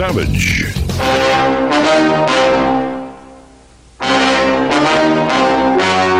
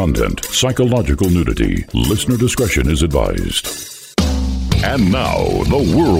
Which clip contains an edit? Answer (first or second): first